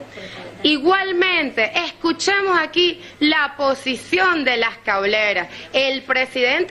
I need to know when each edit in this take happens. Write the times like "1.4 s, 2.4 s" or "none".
1.5 s